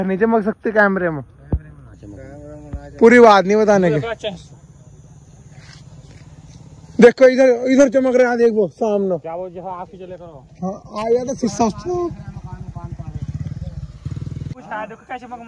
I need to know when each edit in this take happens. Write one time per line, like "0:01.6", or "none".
0:14.5